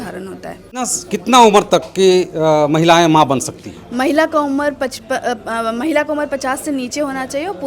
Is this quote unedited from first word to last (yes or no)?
no